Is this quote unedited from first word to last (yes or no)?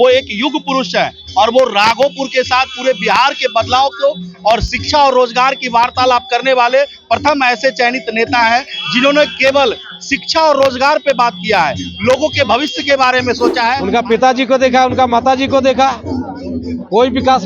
no